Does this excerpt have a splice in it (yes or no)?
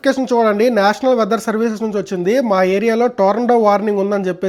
no